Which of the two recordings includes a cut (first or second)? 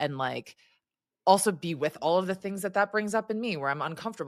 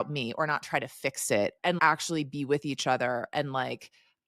second